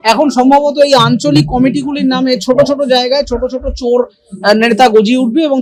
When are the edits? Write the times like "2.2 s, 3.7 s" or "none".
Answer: none